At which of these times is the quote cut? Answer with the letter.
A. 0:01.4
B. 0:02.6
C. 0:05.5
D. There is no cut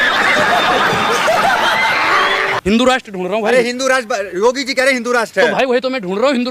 D